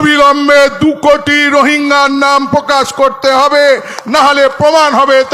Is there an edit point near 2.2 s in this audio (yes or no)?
no